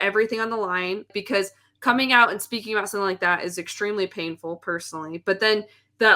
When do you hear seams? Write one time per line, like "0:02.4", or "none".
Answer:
0:01.1